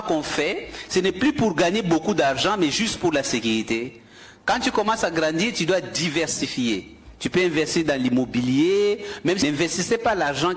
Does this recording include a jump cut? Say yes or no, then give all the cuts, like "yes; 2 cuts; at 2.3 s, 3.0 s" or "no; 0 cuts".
yes; 1 cut; at 9.4 s